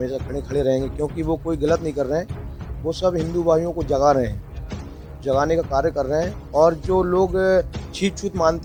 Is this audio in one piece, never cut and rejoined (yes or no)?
yes